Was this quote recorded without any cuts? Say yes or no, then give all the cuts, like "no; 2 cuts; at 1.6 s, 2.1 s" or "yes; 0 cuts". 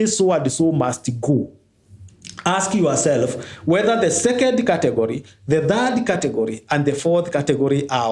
yes; 0 cuts